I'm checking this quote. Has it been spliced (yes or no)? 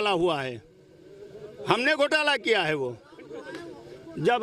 no